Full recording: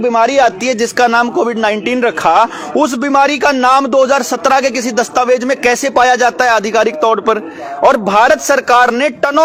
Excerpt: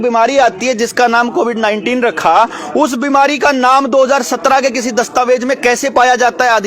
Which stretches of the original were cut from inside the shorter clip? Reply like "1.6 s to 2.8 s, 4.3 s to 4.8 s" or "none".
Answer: none